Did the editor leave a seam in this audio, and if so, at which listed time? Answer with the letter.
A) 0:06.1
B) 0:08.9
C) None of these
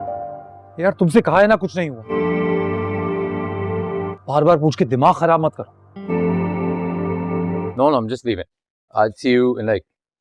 A